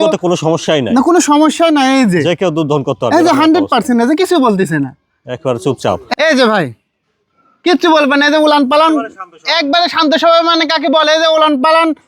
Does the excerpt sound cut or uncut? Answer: cut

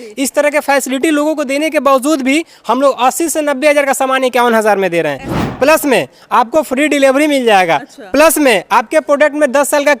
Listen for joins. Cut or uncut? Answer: cut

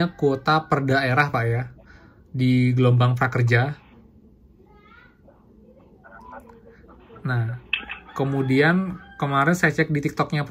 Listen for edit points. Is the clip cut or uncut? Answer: uncut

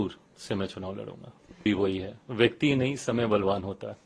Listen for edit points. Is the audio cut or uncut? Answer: cut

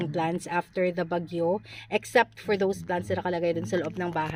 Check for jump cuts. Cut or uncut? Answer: uncut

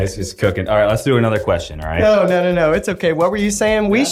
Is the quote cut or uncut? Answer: uncut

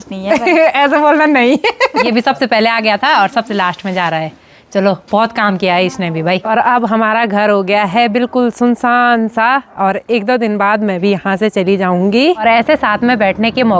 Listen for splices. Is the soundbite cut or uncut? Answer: cut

